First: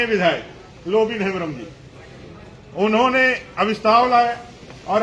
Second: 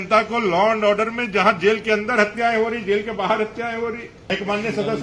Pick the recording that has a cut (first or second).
second